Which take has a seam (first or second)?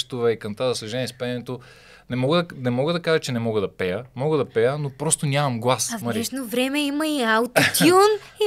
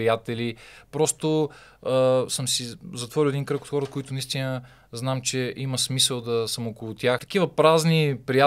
second